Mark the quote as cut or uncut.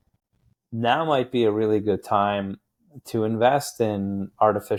uncut